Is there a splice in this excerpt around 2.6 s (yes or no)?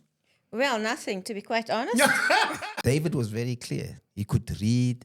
yes